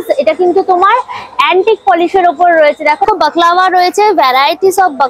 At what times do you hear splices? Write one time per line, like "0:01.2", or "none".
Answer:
0:03.0